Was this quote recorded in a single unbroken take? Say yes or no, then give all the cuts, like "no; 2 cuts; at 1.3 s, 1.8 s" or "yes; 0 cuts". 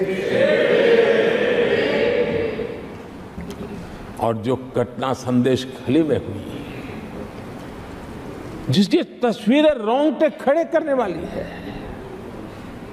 no; 1 cut; at 3.4 s